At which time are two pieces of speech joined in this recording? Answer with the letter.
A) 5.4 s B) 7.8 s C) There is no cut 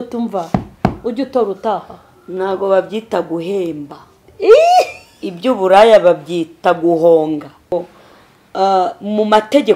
B